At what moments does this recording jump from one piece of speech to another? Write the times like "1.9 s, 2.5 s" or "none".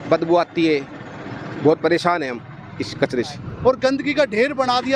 3.4 s